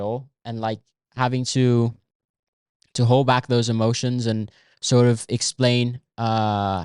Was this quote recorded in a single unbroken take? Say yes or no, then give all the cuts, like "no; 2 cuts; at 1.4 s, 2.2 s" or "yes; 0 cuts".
yes; 0 cuts